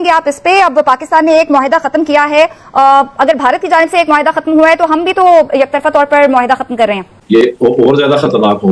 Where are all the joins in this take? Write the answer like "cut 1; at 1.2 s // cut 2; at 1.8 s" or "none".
cut 1; at 7.4 s